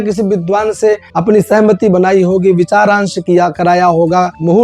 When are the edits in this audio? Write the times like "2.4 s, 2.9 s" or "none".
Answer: 1.1 s